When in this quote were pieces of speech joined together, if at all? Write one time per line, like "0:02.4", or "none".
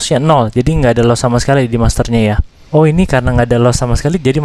0:02.5